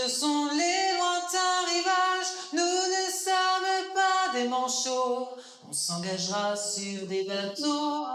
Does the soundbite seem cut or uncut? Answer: uncut